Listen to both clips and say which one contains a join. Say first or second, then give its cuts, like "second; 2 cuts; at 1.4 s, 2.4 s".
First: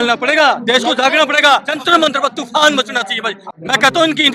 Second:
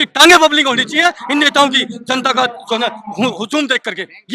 first; 2 cuts; at 1.7 s, 3.4 s